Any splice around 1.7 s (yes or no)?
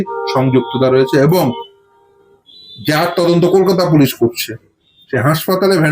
yes